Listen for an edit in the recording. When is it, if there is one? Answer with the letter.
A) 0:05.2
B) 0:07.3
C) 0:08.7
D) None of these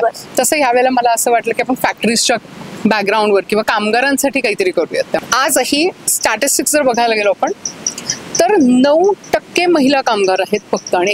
A